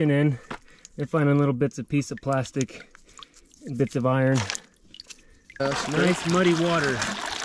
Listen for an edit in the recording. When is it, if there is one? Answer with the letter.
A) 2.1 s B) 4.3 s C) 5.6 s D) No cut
C